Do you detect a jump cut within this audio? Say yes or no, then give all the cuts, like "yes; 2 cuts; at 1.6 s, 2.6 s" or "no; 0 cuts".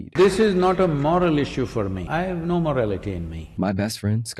yes; 2 cuts; at 2.0 s, 3.4 s